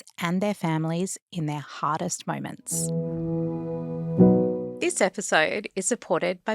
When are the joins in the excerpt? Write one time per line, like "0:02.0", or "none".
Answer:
0:02.6
0:04.7